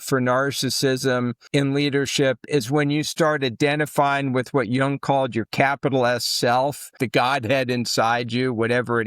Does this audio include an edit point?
yes; 2 cuts; at 1.4 s, 7.0 s

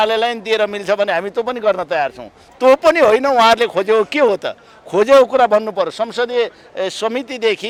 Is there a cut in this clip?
no; 0 cuts

